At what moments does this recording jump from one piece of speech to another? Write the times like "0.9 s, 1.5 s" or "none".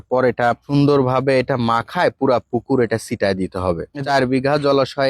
3.9 s